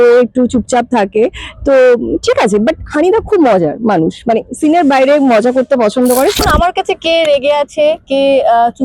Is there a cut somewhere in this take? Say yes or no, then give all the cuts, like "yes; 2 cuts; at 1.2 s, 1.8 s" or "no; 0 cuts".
yes; 1 cut; at 6.4 s